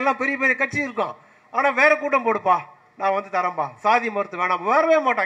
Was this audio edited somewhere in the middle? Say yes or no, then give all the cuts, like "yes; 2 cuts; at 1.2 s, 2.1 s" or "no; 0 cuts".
no; 0 cuts